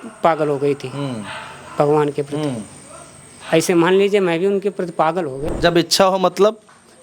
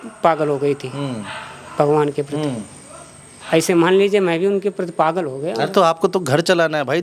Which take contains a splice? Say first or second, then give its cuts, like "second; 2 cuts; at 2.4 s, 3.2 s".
first; 1 cut; at 5.4 s